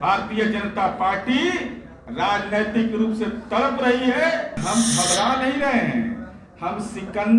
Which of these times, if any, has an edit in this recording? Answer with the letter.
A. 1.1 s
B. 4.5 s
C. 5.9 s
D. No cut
B